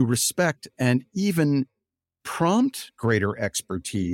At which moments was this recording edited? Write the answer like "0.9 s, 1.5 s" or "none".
none